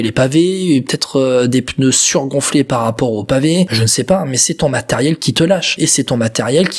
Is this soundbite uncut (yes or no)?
no